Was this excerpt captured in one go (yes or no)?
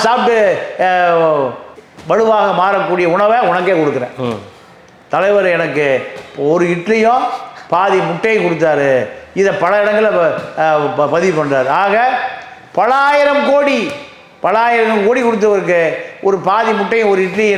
yes